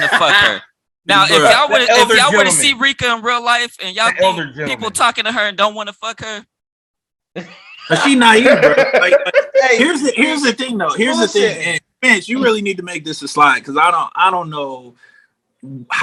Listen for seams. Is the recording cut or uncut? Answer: uncut